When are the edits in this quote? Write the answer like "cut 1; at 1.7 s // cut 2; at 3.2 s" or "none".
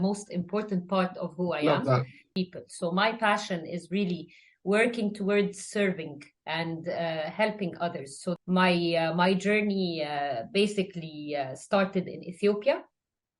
cut 1; at 2.3 s // cut 2; at 8.4 s